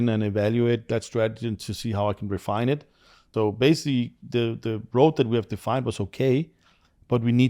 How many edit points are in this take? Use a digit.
1